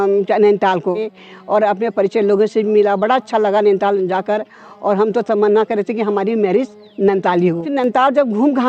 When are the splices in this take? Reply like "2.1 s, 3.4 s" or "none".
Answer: 1.2 s, 7.7 s